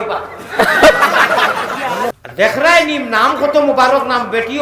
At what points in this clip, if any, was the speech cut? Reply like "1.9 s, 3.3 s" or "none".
2.1 s